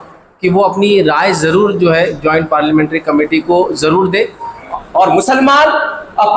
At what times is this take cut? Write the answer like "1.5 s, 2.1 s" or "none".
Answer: 4.7 s